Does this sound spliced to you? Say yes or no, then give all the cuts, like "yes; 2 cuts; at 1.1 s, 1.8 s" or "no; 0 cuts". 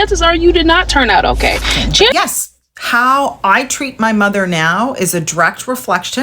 yes; 1 cut; at 2.1 s